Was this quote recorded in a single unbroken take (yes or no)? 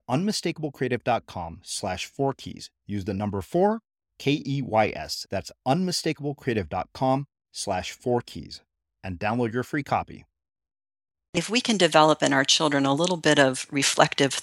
no